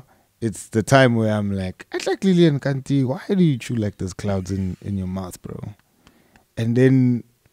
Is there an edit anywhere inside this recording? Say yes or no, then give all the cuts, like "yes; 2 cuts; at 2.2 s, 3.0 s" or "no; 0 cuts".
no; 0 cuts